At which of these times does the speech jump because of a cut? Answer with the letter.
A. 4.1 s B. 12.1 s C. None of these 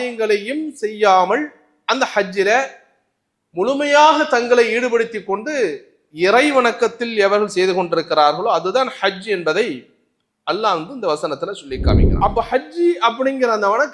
B